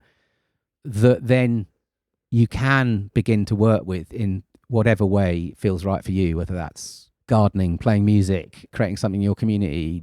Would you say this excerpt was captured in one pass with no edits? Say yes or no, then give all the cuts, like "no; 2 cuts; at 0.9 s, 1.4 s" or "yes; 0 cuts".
no; 1 cut; at 8.7 s